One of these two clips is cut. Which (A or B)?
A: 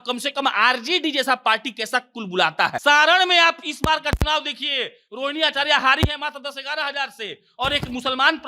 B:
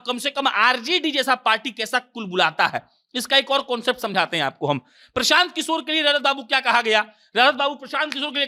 A